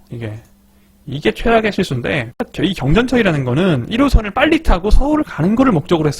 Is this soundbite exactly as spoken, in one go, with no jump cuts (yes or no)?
no